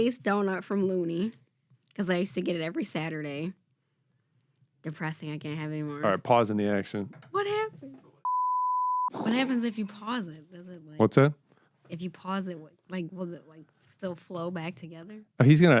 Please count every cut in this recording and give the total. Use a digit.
0